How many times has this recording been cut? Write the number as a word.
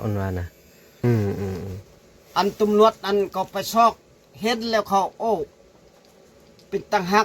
one